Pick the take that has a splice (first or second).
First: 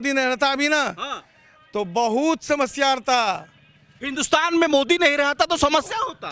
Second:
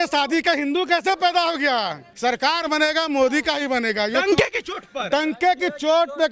second